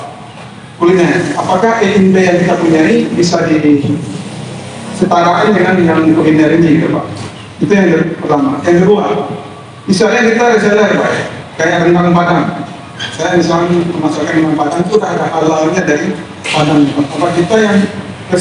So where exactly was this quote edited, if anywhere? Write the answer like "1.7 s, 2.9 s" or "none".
none